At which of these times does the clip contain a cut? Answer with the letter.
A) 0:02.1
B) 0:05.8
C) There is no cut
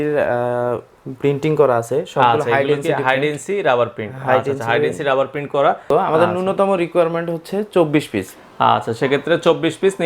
B